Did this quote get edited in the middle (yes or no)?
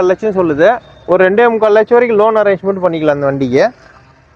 no